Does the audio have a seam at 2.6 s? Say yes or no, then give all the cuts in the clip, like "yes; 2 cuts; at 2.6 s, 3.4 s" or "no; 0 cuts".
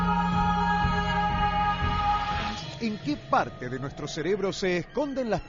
yes; 1 cut; at 2.6 s